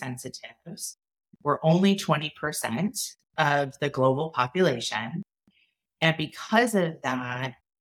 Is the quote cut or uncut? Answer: cut